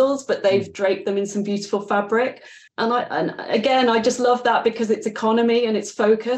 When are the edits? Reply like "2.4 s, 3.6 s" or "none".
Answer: 2.6 s